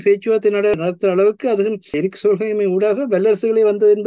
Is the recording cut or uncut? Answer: cut